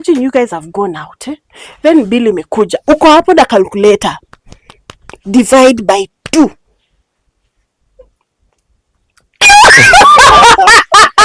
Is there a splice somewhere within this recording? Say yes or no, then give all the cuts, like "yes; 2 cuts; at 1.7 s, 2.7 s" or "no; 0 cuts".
no; 0 cuts